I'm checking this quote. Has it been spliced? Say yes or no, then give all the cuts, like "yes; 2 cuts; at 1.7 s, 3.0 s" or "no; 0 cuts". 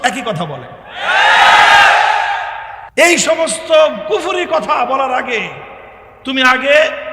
yes; 1 cut; at 3.2 s